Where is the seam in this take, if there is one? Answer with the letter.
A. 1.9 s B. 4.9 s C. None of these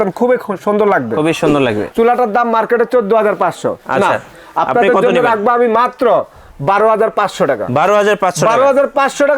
A